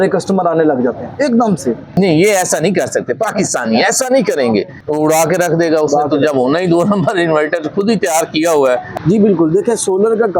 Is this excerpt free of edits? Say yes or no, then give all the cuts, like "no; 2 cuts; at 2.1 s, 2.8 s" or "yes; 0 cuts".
no; 3 cuts; at 1.9 s, 4.8 s, 8.9 s